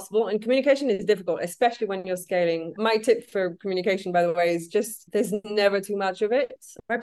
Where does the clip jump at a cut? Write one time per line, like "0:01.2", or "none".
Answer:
none